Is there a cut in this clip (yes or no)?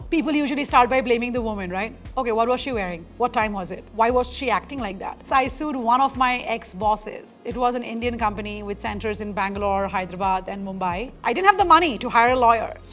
yes